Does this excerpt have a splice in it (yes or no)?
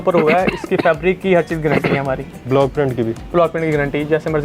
no